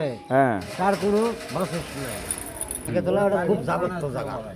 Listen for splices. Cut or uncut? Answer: cut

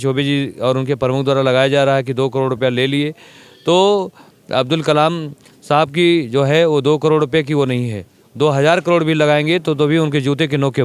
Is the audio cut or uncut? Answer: uncut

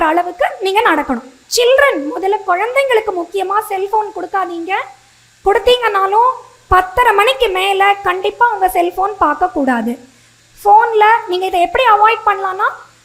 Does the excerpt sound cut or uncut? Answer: cut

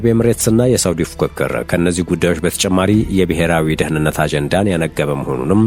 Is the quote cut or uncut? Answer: uncut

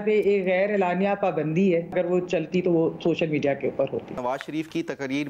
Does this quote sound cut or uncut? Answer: cut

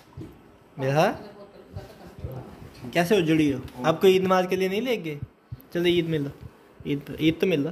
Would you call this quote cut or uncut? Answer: uncut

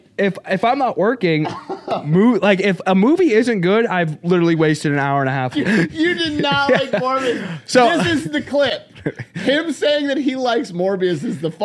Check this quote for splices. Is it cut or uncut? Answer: cut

